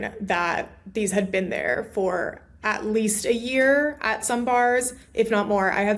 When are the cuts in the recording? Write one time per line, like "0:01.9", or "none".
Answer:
none

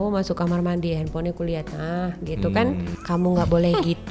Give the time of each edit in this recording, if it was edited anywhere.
0:02.9

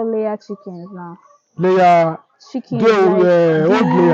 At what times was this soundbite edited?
none

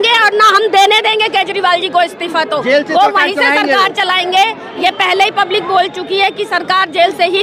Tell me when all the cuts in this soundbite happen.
none

